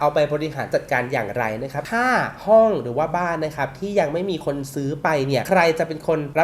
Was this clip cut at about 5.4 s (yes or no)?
no